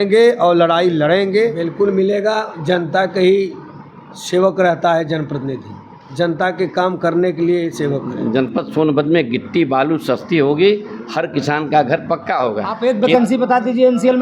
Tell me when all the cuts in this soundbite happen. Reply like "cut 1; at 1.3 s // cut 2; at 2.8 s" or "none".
cut 1; at 1.7 s // cut 2; at 8.1 s // cut 3; at 12.7 s